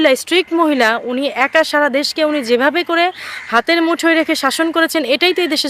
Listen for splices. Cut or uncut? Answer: uncut